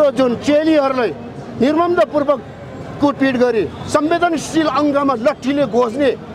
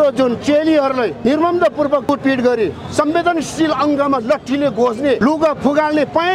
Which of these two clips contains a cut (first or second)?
second